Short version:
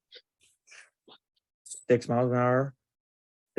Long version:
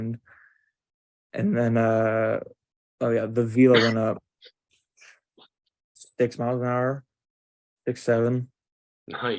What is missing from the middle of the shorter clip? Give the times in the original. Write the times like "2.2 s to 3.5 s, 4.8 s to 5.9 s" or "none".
none